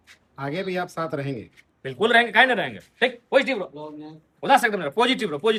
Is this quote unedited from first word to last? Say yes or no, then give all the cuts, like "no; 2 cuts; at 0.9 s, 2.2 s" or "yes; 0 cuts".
yes; 0 cuts